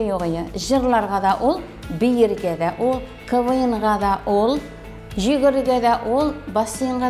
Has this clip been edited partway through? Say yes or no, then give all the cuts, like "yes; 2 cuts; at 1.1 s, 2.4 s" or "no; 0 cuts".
no; 0 cuts